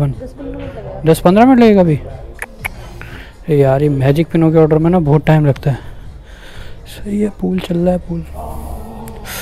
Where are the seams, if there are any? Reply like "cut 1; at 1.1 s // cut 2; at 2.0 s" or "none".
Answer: none